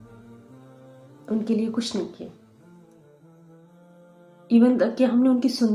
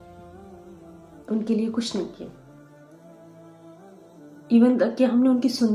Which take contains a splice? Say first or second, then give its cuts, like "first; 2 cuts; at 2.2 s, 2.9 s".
first; 2 cuts; at 2.8 s, 4.2 s